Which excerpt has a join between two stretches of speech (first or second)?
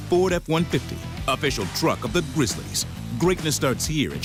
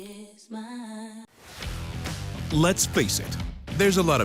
second